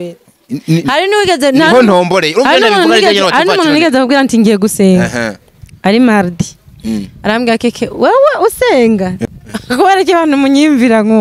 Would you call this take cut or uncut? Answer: cut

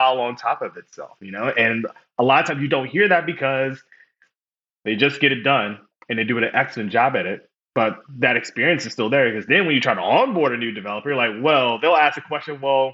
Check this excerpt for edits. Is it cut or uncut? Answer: uncut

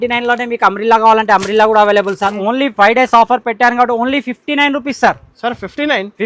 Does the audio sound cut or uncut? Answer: cut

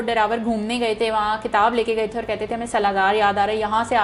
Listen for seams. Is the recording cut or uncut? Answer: uncut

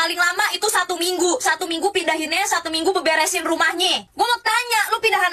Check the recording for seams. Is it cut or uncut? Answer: cut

